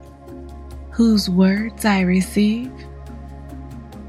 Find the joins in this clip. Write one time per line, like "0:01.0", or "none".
0:00.9